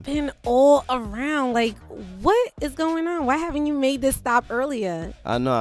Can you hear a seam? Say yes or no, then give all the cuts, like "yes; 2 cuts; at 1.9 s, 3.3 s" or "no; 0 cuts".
yes; 1 cut; at 3.3 s